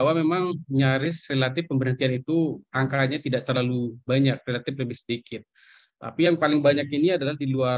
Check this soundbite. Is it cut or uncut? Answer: uncut